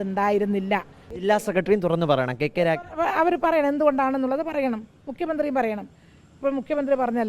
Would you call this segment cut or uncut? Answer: cut